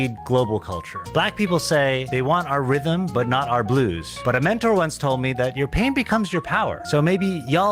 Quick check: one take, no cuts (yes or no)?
yes